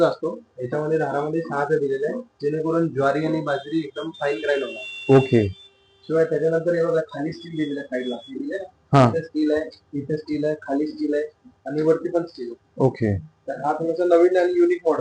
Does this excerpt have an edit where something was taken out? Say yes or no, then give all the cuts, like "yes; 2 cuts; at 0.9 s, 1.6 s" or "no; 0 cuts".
no; 0 cuts